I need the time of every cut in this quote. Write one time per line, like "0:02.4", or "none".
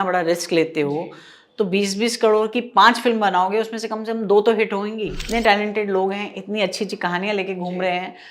0:05.2